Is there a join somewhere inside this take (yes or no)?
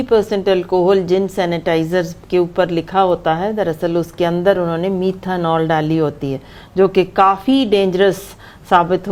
no